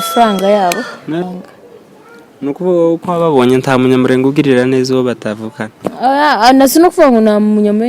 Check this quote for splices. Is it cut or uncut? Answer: cut